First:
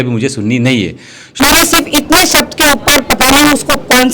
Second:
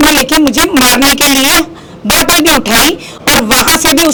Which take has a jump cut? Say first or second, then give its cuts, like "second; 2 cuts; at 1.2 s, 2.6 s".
first; 1 cut; at 1.4 s